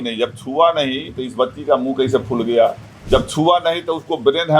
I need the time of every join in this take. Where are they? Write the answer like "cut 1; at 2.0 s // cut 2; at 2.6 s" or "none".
cut 1; at 2.9 s